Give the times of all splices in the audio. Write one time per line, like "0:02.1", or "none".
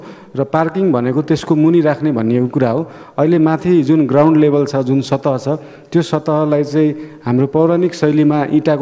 none